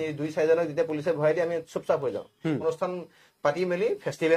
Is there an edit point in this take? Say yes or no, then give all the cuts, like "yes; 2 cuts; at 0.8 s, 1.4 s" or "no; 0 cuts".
yes; 1 cut; at 2.6 s